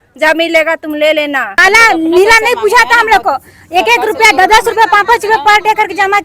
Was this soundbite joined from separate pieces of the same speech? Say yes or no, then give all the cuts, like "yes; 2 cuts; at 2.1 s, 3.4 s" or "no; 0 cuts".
yes; 1 cut; at 1.5 s